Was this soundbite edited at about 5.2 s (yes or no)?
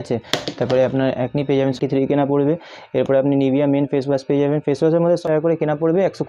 yes